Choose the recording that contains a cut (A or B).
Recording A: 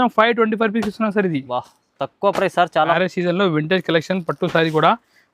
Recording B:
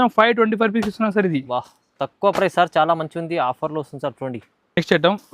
A